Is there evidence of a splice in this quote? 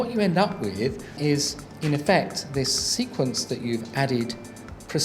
yes; 1 cut; at 1.2 s

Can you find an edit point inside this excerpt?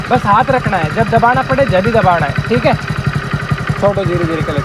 no; 0 cuts

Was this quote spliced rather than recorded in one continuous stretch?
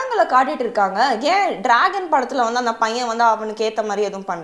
no; 0 cuts

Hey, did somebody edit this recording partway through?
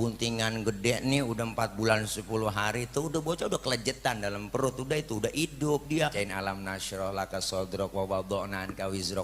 yes; 1 cut; at 6.1 s

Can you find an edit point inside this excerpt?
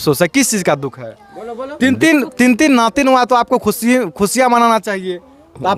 no; 0 cuts

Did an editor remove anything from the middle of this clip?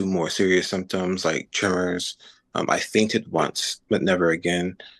no; 0 cuts

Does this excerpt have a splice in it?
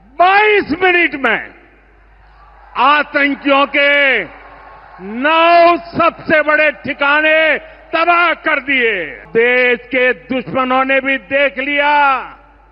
yes; 1 cut; at 9.2 s

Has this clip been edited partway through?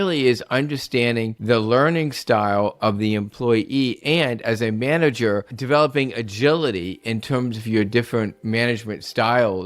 yes; 2 cuts; at 1.3 s, 5.5 s

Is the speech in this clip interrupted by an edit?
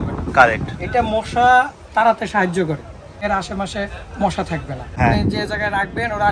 yes; 2 cuts; at 3.2 s, 5.0 s

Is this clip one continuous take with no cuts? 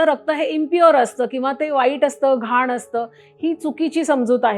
yes; 0 cuts

